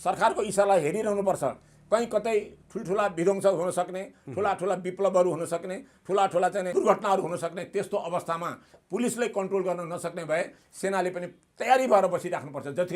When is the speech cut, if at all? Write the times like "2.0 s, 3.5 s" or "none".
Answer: 6.7 s

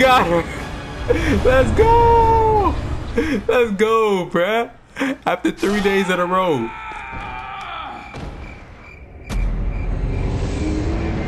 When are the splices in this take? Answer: none

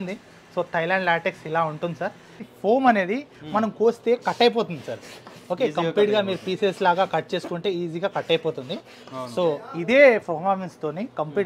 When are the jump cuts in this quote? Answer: 2.5 s

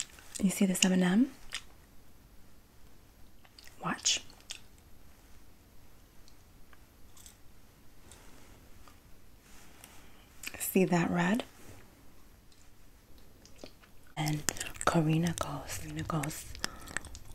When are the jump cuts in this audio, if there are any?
14.2 s

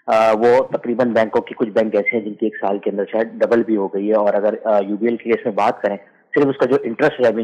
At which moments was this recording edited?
none

